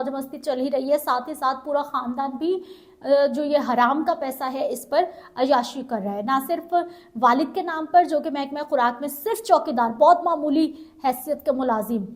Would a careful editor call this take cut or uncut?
uncut